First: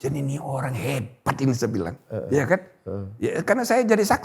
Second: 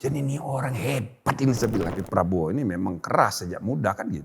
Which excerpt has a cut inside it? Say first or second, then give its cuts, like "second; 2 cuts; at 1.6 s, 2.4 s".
second; 1 cut; at 2.0 s